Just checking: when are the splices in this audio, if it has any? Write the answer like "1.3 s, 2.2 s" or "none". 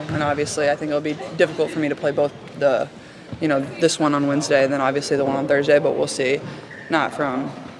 6.1 s

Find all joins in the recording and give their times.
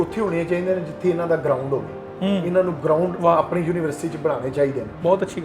none

